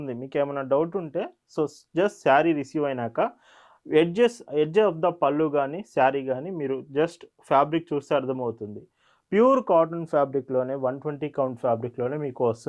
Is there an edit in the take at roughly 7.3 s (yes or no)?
no